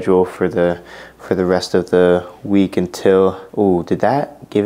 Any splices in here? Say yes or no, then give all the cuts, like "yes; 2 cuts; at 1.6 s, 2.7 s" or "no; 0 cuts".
no; 0 cuts